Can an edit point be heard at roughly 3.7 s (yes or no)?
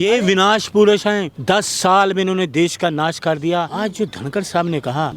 yes